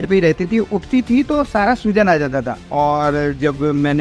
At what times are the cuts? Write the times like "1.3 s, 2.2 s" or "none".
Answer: none